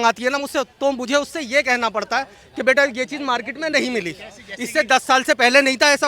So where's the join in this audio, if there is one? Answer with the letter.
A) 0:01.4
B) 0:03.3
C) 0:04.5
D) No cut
D